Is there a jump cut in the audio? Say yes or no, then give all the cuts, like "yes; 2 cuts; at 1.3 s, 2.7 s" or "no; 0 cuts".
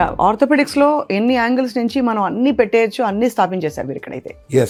no; 0 cuts